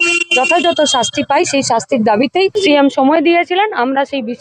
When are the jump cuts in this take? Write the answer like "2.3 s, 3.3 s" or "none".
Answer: 2.5 s